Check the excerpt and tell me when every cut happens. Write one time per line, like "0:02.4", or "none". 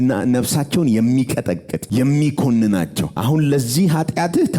0:01.7
0:03.1